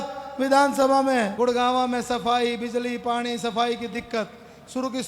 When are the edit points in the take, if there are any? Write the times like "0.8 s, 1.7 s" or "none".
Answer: 1.3 s